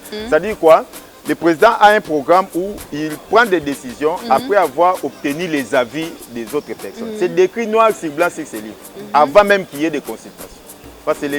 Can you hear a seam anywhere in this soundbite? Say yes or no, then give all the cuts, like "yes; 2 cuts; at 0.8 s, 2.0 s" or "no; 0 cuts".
no; 0 cuts